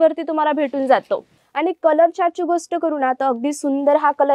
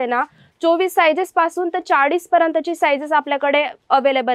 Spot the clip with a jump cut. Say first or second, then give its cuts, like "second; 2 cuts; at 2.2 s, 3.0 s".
first; 1 cut; at 1.4 s